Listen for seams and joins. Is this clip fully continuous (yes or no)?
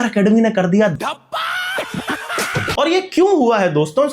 yes